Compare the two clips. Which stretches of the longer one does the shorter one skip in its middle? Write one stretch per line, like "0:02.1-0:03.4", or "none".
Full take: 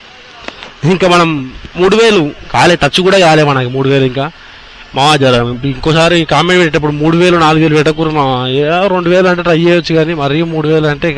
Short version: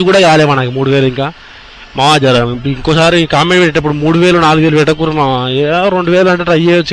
none